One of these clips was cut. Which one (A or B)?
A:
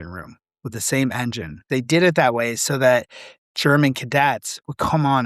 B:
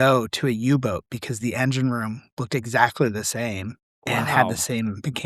A